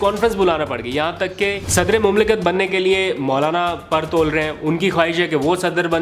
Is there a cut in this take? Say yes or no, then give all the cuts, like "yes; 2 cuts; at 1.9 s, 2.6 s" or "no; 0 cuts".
yes; 1 cut; at 1.6 s